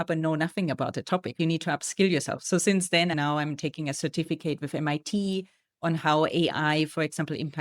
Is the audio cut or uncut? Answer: cut